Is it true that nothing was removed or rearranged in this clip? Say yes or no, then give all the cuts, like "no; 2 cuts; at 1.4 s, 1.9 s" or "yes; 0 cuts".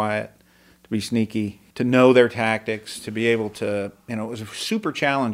no; 1 cut; at 1.6 s